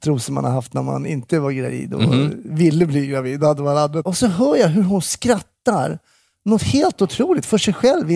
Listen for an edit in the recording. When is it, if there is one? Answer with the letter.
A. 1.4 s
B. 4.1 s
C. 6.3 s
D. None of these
B